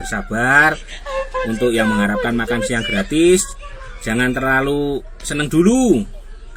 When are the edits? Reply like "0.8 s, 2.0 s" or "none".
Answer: none